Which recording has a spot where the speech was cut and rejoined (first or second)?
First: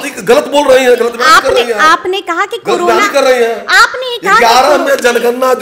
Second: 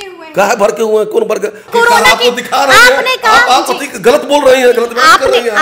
second